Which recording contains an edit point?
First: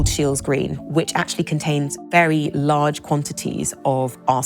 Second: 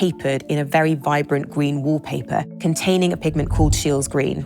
second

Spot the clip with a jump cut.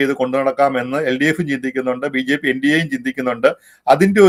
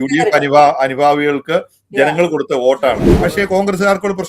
second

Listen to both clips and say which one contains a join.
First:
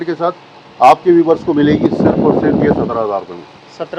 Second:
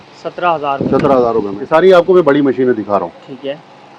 second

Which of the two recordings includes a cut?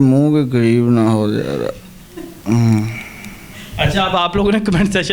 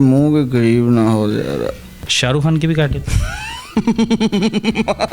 second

